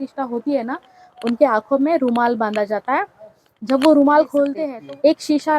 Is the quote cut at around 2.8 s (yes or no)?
no